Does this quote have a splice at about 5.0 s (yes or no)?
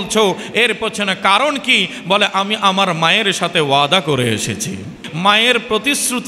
yes